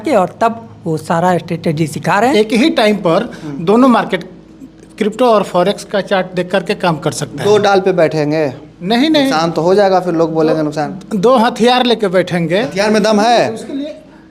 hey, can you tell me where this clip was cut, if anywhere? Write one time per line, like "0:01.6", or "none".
0:02.3
0:12.7